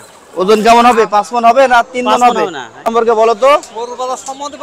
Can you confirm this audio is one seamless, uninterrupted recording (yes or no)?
no